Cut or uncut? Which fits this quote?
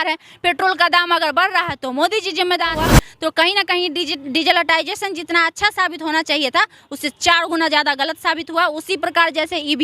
cut